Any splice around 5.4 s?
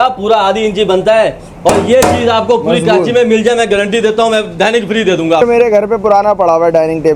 yes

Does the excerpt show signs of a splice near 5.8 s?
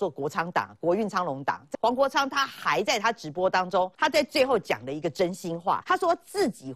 yes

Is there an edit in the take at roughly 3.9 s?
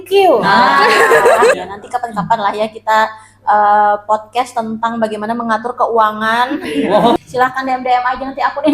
no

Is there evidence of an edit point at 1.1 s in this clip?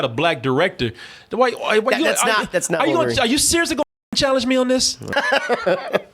no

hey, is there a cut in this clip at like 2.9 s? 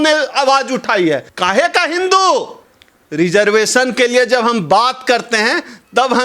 no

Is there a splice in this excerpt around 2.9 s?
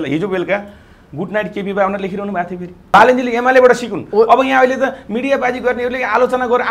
yes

